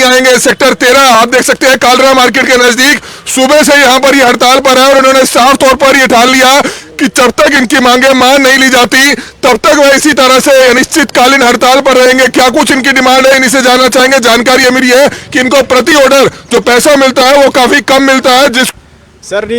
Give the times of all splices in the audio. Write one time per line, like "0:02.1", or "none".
0:18.7